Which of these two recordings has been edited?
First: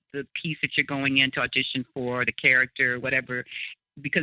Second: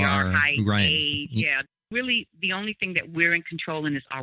second; 1 cut; at 1.6 s

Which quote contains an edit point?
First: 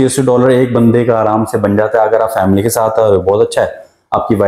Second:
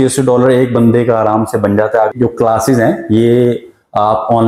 second; 1 cut; at 2.1 s

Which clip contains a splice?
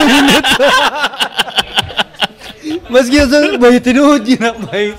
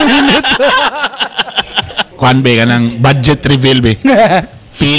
second; 1 cut; at 2.0 s

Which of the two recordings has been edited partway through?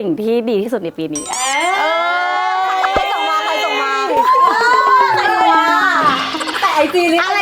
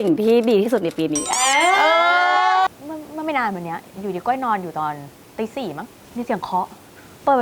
second; 2 cuts; at 2.7 s, 6.0 s

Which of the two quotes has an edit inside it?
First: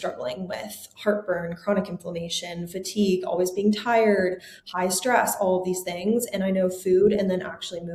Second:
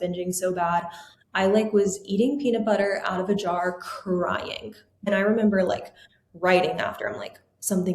second; 1 cut; at 5.1 s

